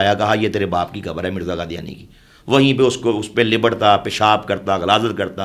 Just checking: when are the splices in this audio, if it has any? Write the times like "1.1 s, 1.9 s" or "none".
none

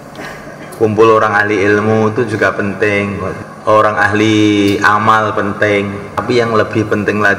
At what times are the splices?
3.3 s, 6.2 s

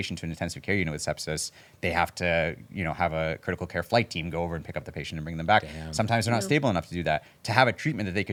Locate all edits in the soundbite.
none

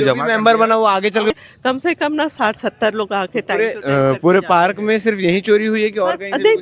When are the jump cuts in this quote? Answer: 1.3 s

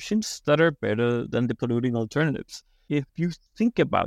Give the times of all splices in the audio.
3.1 s

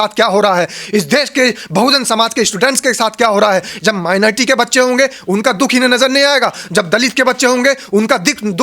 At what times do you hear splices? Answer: none

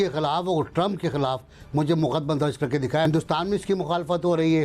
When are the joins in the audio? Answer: 3.0 s

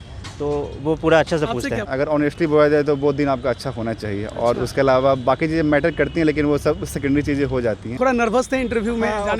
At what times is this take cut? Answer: 1.8 s, 7.9 s

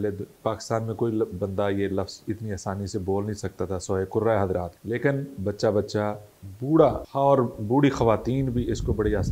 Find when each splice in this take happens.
4.7 s, 7.0 s

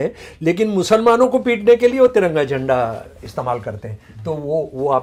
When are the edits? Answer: none

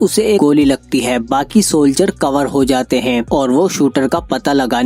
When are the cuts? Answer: none

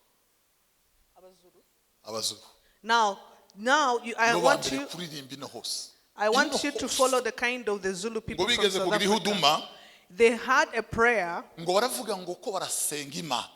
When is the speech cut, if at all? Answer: none

